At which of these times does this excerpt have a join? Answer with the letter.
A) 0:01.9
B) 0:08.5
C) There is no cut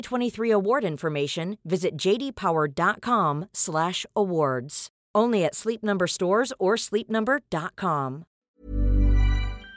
B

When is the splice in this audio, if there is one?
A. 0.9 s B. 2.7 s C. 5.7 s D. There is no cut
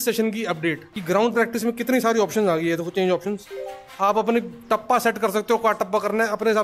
A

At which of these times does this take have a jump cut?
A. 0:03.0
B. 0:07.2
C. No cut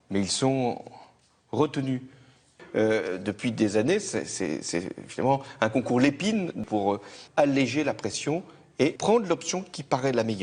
A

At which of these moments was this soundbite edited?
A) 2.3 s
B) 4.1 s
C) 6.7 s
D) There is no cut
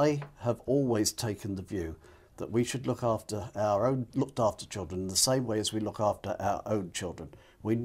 B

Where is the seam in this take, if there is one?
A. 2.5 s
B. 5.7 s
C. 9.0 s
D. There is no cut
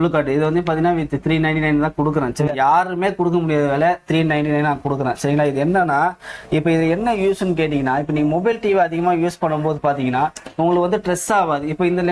A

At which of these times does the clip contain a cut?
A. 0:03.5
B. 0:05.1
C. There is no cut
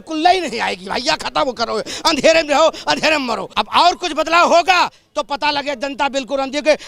A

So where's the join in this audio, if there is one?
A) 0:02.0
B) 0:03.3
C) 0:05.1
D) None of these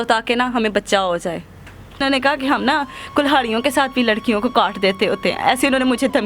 A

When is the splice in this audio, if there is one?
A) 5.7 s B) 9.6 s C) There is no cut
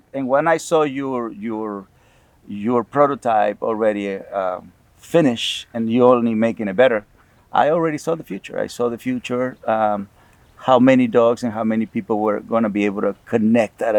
C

